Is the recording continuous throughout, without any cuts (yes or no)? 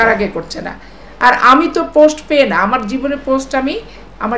yes